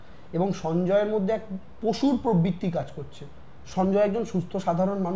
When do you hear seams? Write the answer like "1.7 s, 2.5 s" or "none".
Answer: none